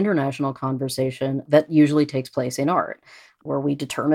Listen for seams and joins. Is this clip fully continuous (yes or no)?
no